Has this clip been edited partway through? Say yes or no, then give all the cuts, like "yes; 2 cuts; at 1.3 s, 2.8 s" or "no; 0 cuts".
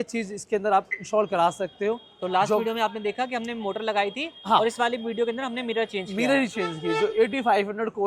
no; 0 cuts